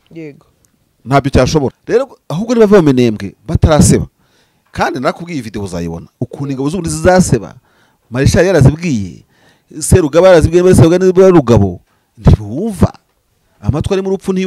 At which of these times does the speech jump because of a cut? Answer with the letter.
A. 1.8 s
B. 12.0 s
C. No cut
A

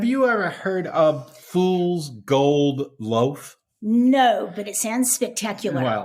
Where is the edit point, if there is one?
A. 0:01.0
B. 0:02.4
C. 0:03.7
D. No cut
D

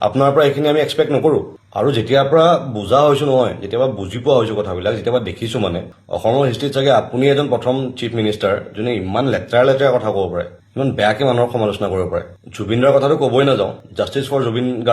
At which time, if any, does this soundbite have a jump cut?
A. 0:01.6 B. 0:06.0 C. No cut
C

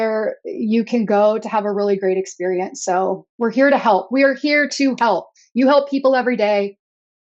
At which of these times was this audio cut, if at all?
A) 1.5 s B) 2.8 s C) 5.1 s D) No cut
D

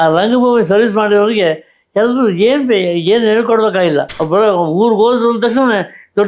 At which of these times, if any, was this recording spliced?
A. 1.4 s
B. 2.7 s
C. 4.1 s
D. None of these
C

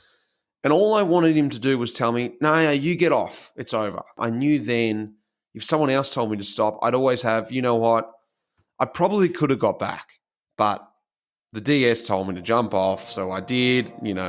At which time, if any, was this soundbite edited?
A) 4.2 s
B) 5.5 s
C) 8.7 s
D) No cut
A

